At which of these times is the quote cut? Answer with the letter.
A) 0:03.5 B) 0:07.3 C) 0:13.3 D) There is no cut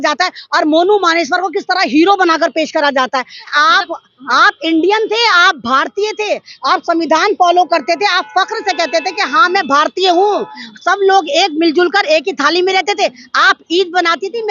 A